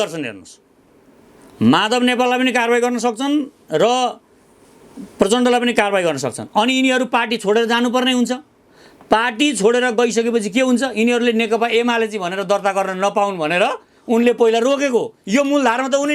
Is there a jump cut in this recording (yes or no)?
no